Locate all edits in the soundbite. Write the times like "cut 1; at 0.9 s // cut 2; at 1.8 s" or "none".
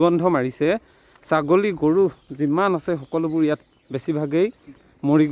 none